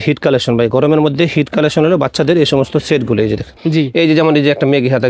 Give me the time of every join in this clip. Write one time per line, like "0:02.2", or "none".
0:03.6

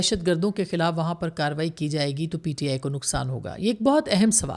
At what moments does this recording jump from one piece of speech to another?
none

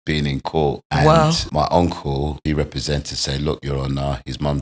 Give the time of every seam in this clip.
0:00.8
0:01.4
0:02.4

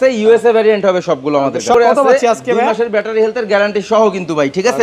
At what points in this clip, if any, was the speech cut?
0:01.7

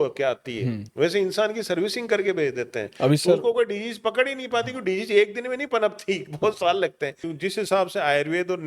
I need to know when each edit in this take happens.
0:07.3

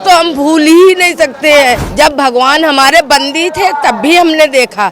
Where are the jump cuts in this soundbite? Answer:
0:01.8

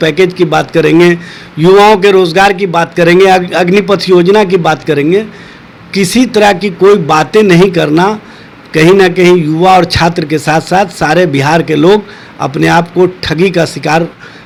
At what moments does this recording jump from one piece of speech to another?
none

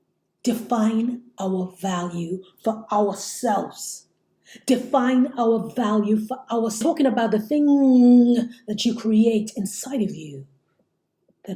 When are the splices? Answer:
0:06.8

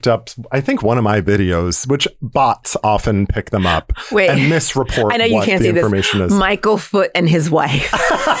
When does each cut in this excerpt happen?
none

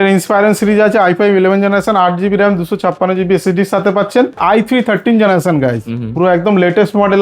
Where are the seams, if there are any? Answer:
0:04.4

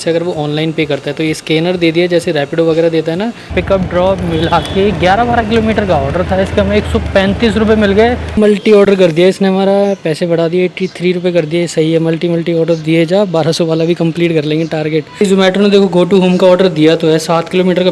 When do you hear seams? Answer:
0:03.5
0:08.4
0:15.2

